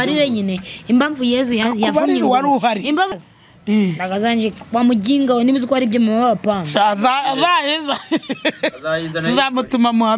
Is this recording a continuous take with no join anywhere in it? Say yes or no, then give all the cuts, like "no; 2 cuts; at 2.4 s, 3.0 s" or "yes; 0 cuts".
no; 1 cut; at 3.1 s